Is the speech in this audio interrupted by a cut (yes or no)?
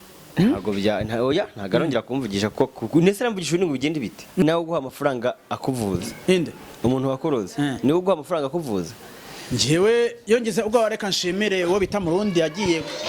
yes